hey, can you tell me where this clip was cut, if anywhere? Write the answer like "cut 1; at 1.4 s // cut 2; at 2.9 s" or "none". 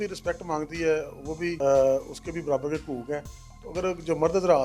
cut 1; at 1.6 s

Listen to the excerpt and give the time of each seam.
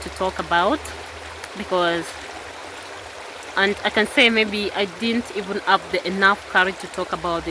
none

